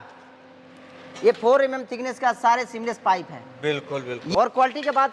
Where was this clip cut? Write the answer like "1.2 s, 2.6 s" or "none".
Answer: 4.2 s